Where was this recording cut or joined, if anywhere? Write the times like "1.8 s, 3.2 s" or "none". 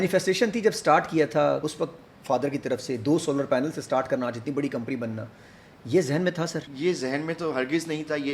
1.6 s, 6.7 s